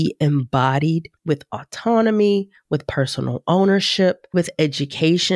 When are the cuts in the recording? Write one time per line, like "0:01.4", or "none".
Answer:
0:01.1
0:04.3